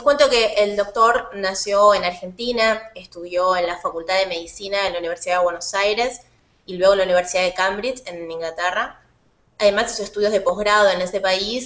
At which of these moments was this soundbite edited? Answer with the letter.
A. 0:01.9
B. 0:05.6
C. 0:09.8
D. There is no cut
D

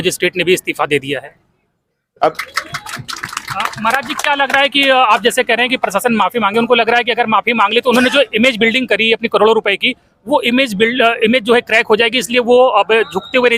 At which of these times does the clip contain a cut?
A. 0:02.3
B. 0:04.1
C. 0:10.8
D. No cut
A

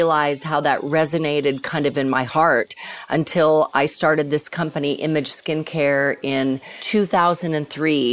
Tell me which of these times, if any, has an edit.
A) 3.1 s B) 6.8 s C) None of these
B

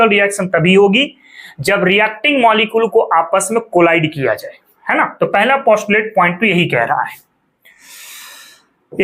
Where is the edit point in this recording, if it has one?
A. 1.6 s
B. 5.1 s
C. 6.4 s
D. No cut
D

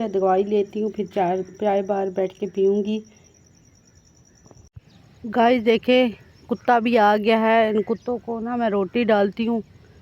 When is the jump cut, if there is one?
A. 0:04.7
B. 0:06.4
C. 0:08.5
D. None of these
A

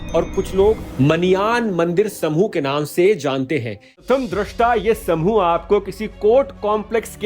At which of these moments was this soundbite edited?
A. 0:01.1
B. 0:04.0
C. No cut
B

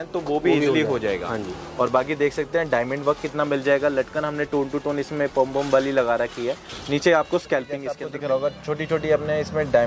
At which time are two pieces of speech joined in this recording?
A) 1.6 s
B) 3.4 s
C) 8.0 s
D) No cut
C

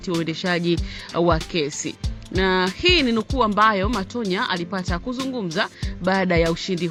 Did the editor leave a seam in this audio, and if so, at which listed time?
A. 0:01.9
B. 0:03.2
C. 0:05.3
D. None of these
D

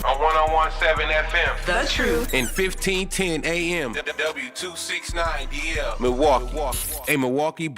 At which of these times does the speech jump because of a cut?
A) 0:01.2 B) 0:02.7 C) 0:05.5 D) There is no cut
D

